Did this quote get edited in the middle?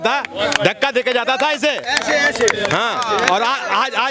no; 0 cuts

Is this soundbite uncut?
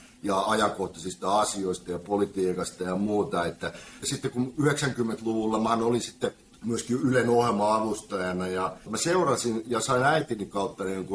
no; 3 cuts; at 3.9 s, 6.5 s, 8.9 s

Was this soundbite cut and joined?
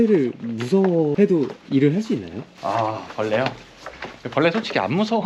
no; 0 cuts

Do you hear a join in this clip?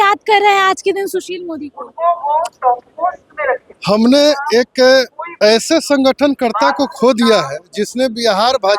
no; 0 cuts

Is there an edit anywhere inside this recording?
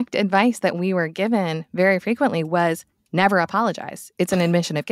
no; 0 cuts

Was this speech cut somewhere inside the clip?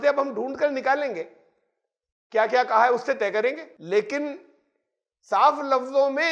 yes; 1 cut; at 3.7 s

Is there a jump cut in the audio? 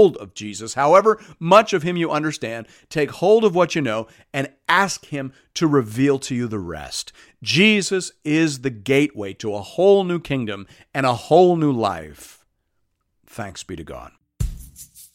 yes; 1 cut; at 14.2 s

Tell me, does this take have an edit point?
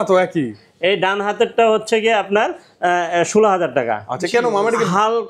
no; 0 cuts

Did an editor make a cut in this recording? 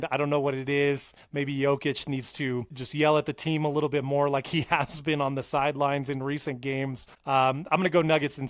yes; 3 cuts; at 1.2 s, 2.8 s, 7.1 s

